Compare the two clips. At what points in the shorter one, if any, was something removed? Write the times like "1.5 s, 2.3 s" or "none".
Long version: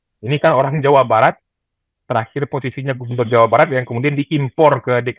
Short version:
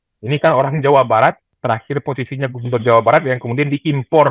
1.5 s